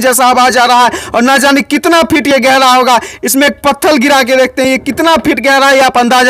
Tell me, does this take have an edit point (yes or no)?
no